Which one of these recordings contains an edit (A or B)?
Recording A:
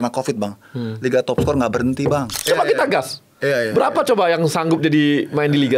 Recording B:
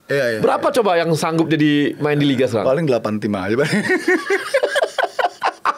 A